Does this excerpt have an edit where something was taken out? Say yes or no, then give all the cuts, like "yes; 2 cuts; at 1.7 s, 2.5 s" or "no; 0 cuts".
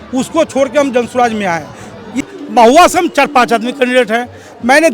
yes; 1 cut; at 2.3 s